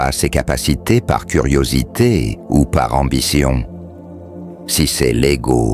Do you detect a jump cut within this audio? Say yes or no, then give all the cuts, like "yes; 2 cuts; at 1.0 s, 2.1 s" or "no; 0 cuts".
no; 0 cuts